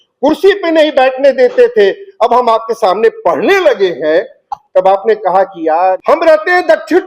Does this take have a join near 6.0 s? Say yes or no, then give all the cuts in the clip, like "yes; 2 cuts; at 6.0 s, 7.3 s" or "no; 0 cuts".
yes; 1 cut; at 6.0 s